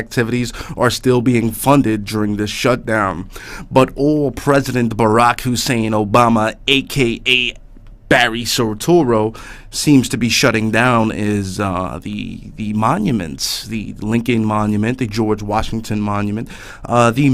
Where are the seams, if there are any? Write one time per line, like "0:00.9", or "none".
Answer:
0:05.5